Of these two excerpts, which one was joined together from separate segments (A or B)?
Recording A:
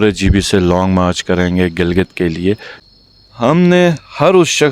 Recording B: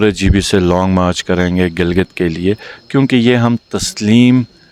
A